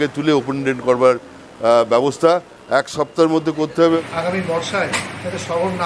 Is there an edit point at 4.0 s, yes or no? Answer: yes